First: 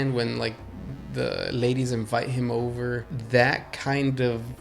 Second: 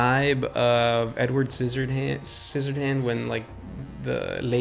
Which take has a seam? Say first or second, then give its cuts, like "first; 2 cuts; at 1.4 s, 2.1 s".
first; 1 cut; at 3.1 s